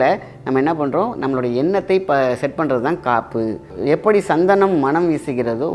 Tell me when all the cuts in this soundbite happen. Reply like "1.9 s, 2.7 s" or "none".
3.7 s